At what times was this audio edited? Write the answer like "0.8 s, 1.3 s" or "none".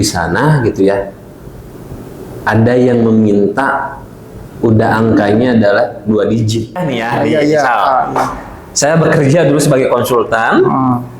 6.8 s